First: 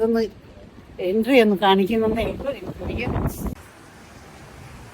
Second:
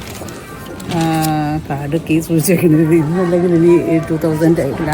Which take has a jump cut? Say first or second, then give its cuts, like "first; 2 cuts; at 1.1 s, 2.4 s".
first; 1 cut; at 3.6 s